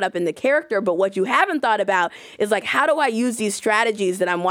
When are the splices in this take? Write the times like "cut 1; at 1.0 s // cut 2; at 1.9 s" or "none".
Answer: none